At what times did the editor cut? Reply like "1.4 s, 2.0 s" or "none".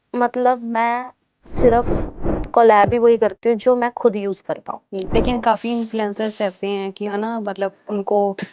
4.8 s